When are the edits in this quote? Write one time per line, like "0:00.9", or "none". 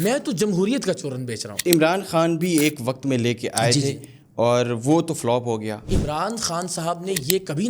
0:01.5
0:05.8